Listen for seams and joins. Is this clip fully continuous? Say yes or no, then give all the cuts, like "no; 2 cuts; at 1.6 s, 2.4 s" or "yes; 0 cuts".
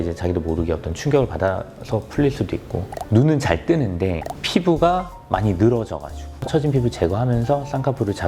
no; 2 cuts; at 2.9 s, 6.3 s